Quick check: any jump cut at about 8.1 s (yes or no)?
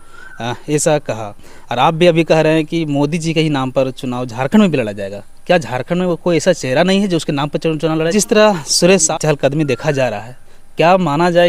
yes